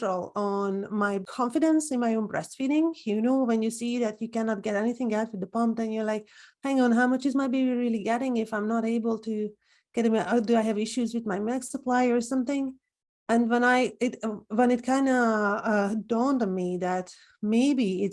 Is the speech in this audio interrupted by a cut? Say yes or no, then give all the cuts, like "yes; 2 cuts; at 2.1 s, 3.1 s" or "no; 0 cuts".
yes; 1 cut; at 1.2 s